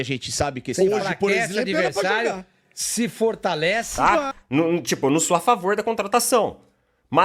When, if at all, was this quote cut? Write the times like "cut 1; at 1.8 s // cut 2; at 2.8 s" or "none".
cut 1; at 3.9 s